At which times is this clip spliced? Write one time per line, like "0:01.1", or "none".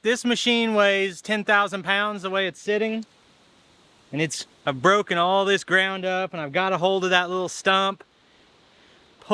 none